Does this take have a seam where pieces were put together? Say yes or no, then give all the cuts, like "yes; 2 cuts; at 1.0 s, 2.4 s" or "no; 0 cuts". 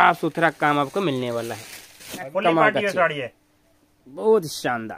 yes; 1 cut; at 2.3 s